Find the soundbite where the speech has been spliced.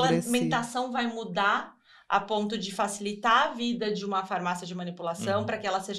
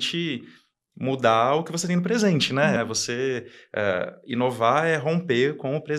second; 1 cut; at 2.8 s

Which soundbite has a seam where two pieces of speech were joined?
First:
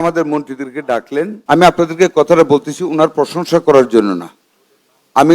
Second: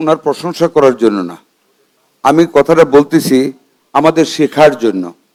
first; 1 cut; at 1.4 s

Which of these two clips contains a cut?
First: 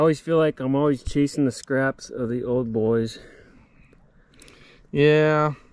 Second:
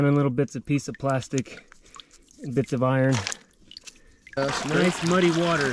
second; 1 cut; at 4.4 s

